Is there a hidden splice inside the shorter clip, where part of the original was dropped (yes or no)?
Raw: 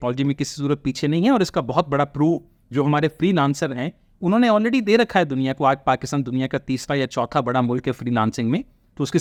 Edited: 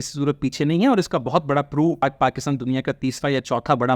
yes